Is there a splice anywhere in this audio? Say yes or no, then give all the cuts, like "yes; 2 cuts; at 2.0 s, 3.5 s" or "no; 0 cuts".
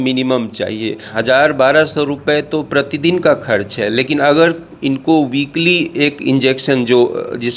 yes; 1 cut; at 1.0 s